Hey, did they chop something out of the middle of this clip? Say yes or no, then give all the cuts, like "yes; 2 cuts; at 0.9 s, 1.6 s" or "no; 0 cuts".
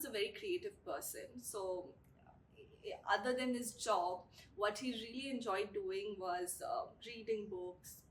no; 0 cuts